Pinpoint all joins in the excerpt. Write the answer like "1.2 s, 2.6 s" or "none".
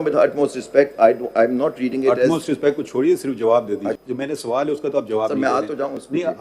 4.0 s